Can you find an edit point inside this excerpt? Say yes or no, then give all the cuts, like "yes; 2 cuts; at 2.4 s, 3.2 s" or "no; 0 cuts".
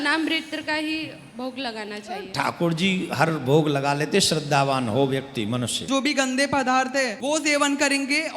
yes; 2 cuts; at 5.8 s, 7.2 s